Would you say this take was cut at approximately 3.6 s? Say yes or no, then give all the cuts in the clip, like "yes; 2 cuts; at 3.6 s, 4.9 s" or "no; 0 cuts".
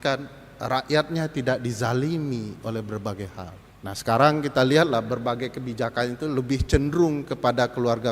yes; 1 cut; at 3.6 s